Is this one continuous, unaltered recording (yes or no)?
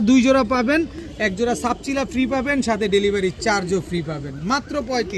yes